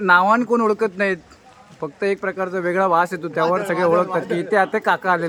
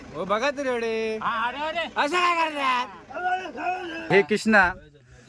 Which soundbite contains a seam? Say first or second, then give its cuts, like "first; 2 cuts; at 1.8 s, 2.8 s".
second; 1 cut; at 4.1 s